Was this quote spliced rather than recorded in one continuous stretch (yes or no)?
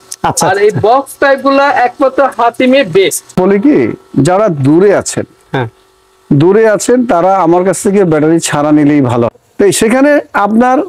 yes